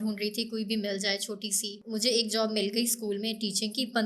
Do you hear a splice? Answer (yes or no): no